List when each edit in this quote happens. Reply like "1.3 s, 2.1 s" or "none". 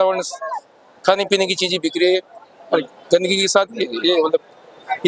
none